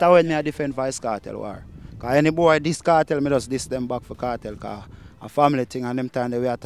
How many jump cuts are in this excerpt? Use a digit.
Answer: 0